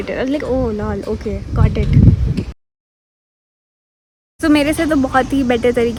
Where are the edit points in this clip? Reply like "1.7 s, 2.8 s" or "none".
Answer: none